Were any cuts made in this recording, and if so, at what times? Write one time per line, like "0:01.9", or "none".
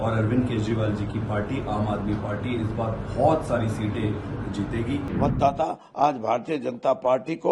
0:05.1